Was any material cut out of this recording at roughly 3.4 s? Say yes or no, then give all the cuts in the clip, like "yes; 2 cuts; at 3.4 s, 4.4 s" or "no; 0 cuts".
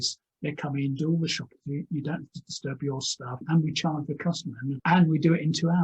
yes; 2 cuts; at 3.4 s, 4.8 s